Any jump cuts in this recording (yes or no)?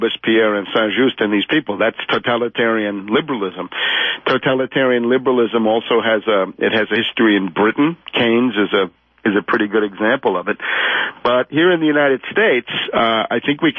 yes